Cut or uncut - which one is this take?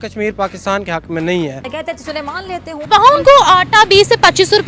cut